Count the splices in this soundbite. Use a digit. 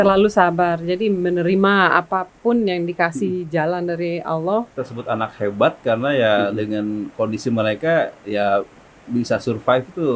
1